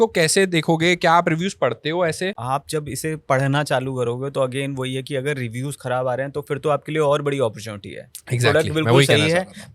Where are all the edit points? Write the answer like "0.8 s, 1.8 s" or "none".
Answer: 2.4 s